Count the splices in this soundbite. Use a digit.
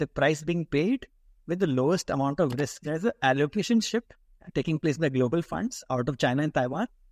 1